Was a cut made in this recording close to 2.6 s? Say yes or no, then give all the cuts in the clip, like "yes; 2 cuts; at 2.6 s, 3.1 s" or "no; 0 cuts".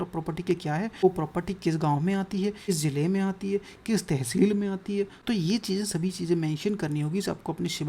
yes; 3 cuts; at 1.0 s, 2.6 s, 5.2 s